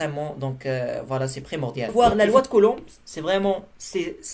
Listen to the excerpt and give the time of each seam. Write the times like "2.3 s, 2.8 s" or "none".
1.9 s